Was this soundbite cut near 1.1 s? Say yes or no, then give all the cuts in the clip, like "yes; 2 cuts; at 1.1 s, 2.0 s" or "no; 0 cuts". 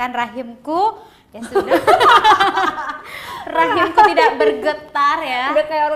no; 0 cuts